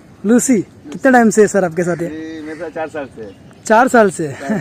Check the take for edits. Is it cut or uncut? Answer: uncut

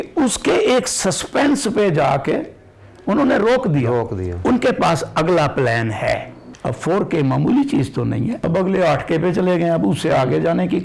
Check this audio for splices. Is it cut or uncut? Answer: cut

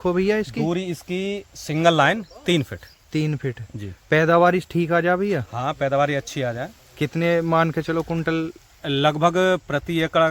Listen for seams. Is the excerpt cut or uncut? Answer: uncut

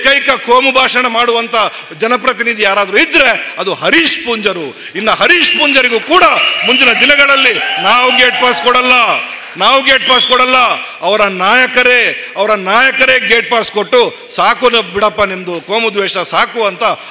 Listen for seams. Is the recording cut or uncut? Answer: uncut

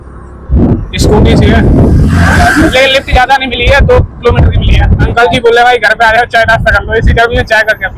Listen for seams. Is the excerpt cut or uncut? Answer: cut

